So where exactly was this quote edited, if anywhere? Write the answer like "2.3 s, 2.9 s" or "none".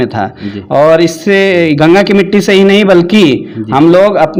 none